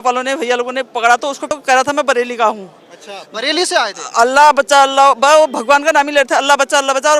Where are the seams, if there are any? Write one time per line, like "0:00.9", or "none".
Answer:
0:01.6